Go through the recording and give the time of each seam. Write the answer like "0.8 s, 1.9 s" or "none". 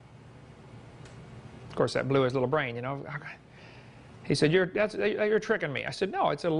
5.6 s